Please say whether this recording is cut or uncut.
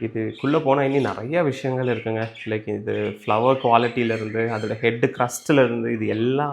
uncut